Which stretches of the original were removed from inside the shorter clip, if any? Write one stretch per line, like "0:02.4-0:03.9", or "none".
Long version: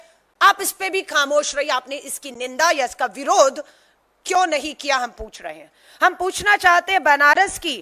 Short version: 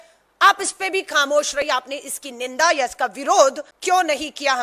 0:03.7-0:04.1